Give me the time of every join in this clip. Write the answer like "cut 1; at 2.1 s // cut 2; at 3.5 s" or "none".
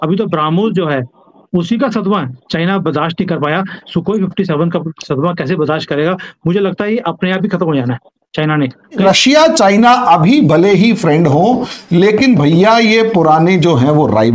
cut 1; at 9.0 s